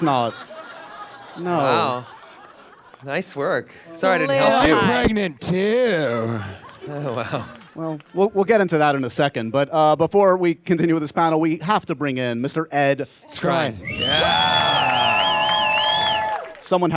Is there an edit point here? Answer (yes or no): no